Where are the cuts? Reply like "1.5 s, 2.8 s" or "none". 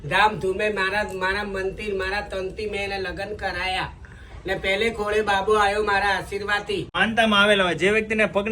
6.9 s